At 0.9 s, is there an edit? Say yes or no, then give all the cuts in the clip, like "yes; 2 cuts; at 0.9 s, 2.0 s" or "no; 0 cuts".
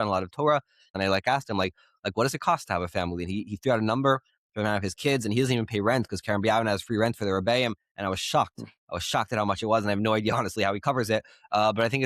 yes; 1 cut; at 0.9 s